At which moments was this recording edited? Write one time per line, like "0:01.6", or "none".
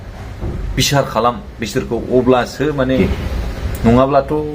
0:03.0